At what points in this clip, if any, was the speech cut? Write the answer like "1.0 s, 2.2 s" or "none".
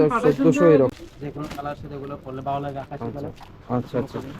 0.9 s